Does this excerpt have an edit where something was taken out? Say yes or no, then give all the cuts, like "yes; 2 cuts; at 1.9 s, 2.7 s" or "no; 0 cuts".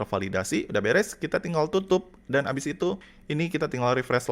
yes; 1 cut; at 3.1 s